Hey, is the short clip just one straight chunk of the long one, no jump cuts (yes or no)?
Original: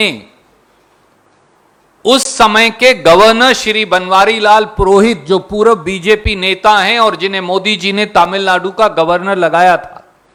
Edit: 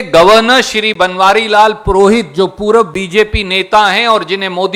yes